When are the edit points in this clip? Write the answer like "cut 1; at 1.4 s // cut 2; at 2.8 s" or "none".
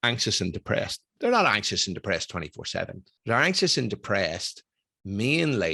cut 1; at 1.0 s // cut 2; at 3.1 s